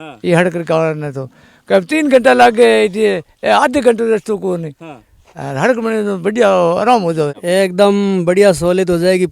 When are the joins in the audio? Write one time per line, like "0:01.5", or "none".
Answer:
0:07.4